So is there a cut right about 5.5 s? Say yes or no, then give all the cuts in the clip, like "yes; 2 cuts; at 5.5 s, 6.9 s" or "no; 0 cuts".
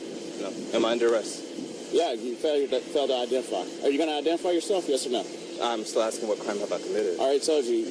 no; 0 cuts